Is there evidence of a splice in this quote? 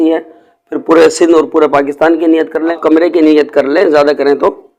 yes; 1 cut; at 2.8 s

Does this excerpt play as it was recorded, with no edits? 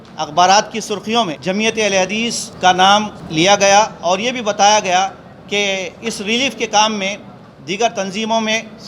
no; 3 cuts; at 1.4 s, 2.5 s, 3.2 s

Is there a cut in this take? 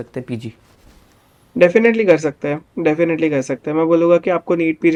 no; 0 cuts

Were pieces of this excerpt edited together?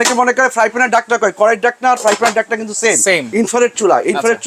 yes; 1 cut; at 3.3 s

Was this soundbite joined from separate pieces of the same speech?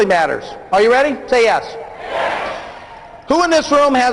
no; 0 cuts

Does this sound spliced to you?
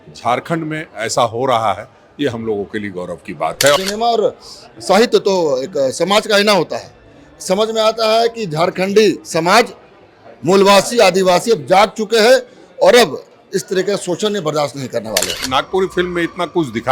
yes; 2 cuts; at 3.8 s, 15.4 s

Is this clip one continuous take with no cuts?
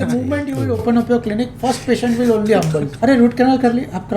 no; 1 cut; at 2.9 s

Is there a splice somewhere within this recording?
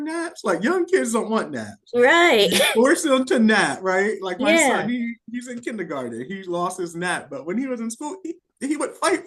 no; 0 cuts

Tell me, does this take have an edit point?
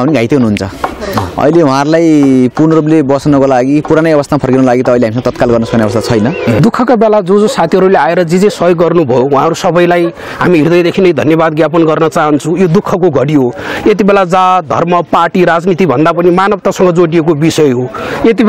yes; 1 cut; at 6.6 s

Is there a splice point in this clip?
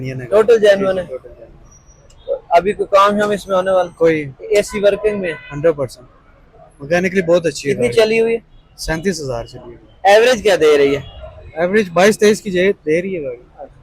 no; 0 cuts

